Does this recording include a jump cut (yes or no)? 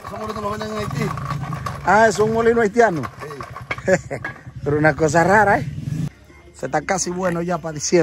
yes